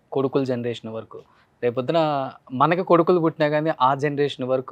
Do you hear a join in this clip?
no; 0 cuts

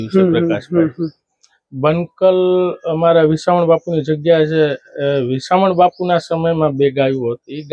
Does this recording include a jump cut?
no; 0 cuts

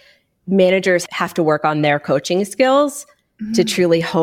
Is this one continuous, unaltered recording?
no; 1 cut; at 1.2 s

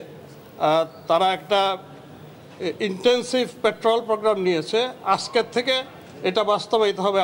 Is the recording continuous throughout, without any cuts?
yes; 0 cuts

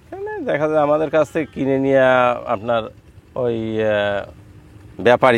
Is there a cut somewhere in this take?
no; 0 cuts

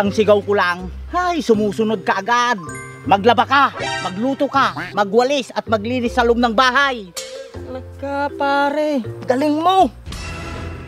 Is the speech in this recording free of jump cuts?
no; 1 cut; at 10.0 s

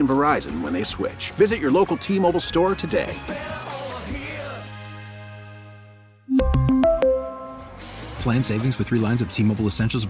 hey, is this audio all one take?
yes; 0 cuts

